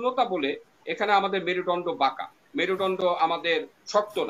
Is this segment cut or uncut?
uncut